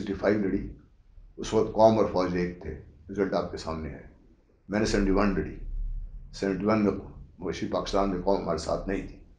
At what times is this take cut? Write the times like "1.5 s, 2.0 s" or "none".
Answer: none